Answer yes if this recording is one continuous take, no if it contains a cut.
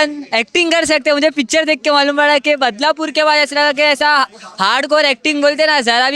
yes